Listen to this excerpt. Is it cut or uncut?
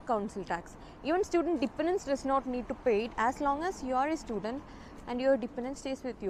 uncut